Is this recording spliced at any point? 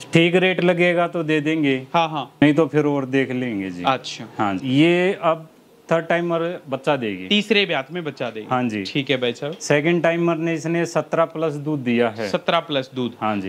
yes; 2 cuts; at 2.4 s, 4.6 s

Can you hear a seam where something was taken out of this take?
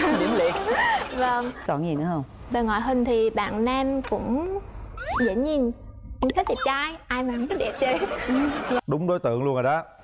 yes; 2 cuts; at 1.7 s, 8.8 s

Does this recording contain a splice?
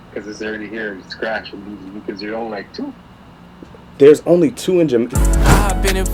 yes; 1 cut; at 5.1 s

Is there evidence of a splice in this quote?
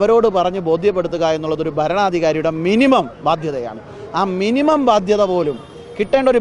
no; 0 cuts

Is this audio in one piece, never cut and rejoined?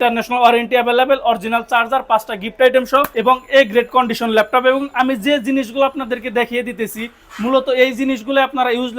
no; 1 cut; at 3.1 s

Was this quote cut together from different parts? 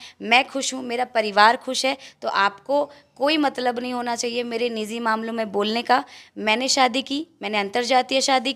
no; 0 cuts

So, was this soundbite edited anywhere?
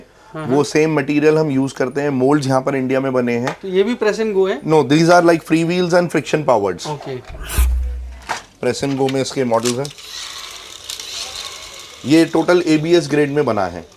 yes; 1 cut; at 7.7 s

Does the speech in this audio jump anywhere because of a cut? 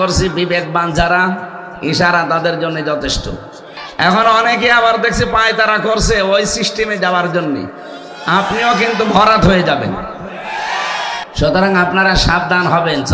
yes; 2 cuts; at 3.8 s, 11.3 s

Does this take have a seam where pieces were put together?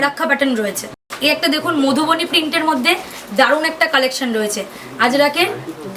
no; 0 cuts

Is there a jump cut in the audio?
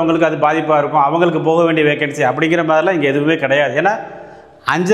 no; 0 cuts

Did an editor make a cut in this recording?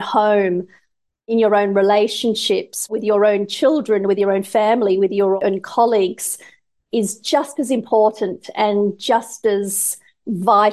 yes; 1 cut; at 5.4 s

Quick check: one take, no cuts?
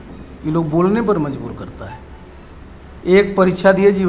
yes; 0 cuts

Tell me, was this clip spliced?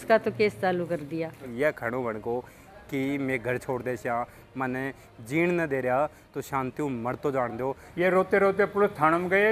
yes; 2 cuts; at 1.4 s, 7.8 s

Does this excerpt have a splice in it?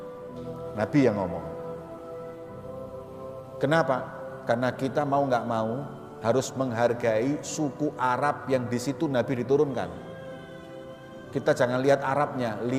yes; 2 cuts; at 1.4 s, 3.6 s

